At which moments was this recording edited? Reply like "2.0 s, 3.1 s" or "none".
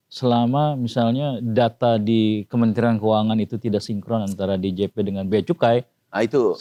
none

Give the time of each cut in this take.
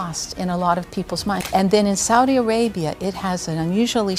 1.4 s

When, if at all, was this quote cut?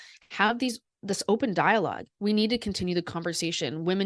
none

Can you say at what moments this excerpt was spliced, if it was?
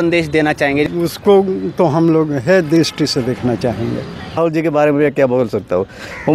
0.9 s, 4.4 s

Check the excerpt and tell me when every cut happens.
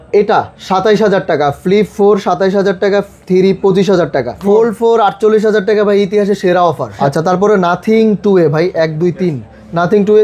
4.4 s, 6.9 s

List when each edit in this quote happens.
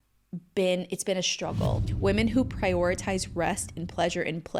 1.8 s

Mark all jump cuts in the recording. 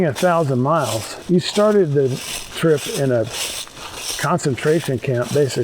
1.1 s

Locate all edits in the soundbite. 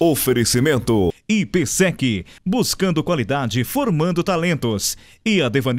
1.2 s

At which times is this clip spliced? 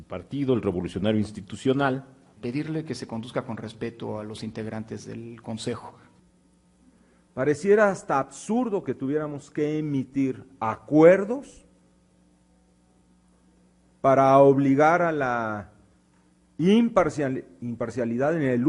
2.3 s, 6.0 s

